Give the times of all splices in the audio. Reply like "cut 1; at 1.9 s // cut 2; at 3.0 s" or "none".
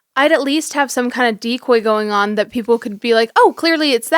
none